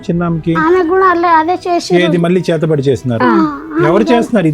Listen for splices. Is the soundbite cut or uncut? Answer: uncut